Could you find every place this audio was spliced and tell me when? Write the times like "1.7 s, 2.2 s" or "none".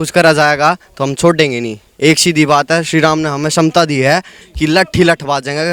none